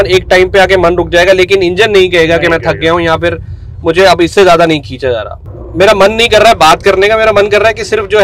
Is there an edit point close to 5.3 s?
yes; 1 cut; at 5.3 s

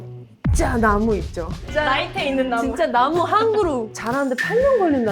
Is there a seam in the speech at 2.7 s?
no; 1 cut; at 3.9 s

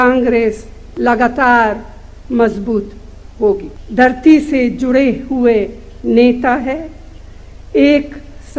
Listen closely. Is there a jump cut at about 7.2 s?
no; 1 cut; at 3.8 s

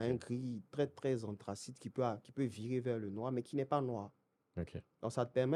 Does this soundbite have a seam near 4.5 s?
no; 0 cuts

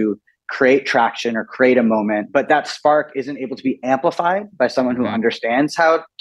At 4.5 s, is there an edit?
no; 1 cut; at 2.2 s

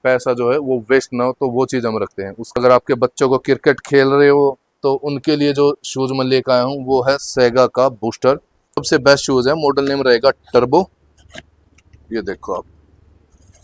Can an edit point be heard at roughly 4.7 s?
no; 2 cuts; at 2.5 s, 8.8 s

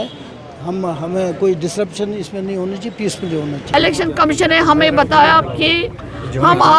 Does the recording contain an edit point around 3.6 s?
yes; 1 cut; at 3.6 s

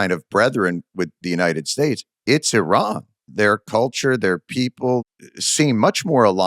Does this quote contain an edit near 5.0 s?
yes; 1 cut; at 5.0 s

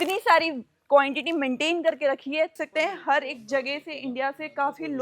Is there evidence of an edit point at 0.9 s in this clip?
no; 1 cut; at 2.6 s

